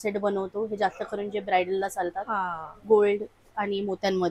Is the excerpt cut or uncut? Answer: uncut